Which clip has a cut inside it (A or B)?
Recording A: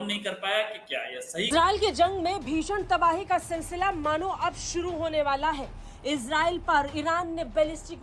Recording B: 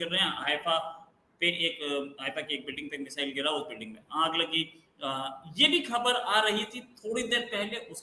A